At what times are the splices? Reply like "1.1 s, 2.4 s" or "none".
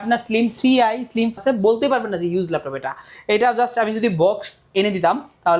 1.4 s